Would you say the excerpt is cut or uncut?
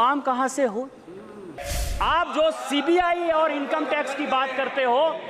cut